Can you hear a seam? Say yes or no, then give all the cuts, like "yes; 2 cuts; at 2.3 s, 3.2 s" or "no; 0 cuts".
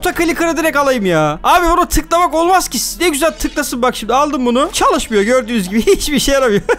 no; 0 cuts